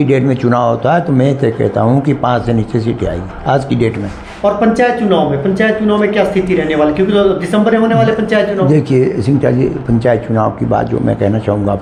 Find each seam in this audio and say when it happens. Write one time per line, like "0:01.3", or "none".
none

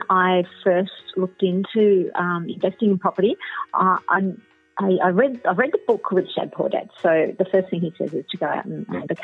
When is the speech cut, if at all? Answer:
none

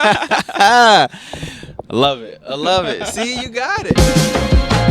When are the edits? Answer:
0:04.0

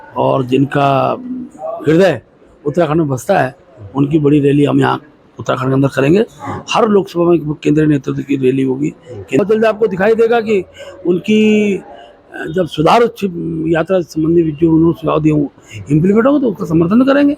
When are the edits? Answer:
0:09.4

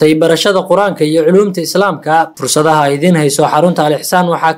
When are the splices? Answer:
0:02.3

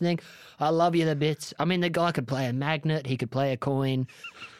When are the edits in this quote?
none

